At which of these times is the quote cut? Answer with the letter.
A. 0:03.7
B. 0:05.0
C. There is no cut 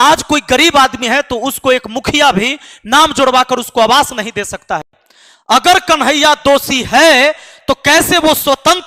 B